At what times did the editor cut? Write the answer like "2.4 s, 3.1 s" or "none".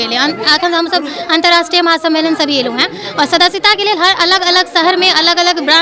none